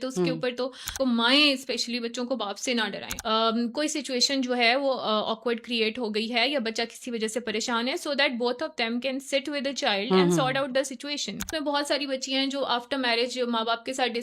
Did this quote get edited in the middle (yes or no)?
yes